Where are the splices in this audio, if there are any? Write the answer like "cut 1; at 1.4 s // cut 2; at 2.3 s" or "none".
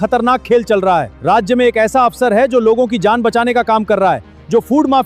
cut 1; at 1.1 s